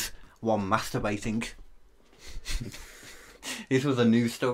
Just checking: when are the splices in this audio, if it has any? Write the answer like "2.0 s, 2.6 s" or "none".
none

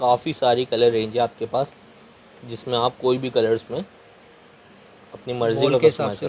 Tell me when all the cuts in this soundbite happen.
none

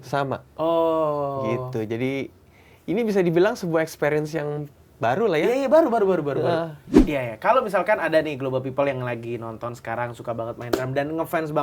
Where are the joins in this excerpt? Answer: 6.9 s

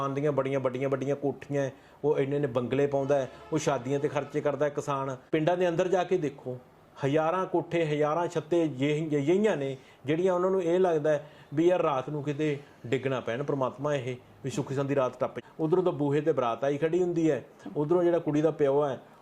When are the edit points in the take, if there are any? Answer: 5.2 s, 15.4 s

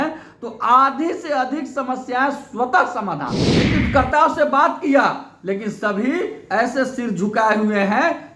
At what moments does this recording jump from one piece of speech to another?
3.7 s

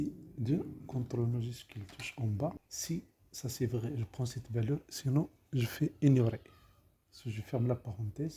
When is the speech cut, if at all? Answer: 2.6 s

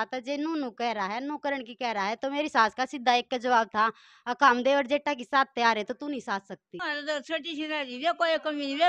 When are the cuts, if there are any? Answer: 6.8 s

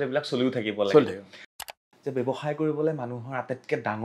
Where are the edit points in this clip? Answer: 1.6 s

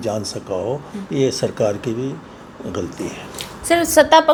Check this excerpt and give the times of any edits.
none

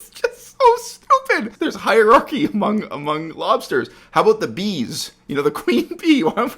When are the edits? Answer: 1.5 s

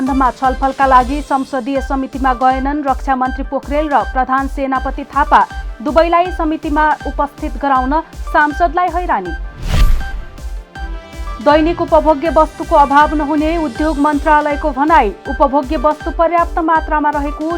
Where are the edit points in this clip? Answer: 11.4 s

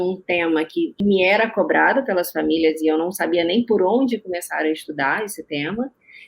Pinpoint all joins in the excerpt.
1.0 s

